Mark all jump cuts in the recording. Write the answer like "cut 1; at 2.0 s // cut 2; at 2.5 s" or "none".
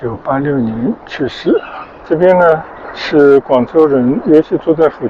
cut 1; at 2.0 s